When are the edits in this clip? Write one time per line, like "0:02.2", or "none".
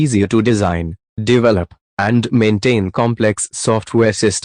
none